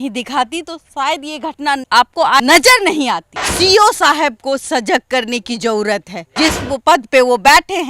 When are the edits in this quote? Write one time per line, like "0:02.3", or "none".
0:01.9
0:03.3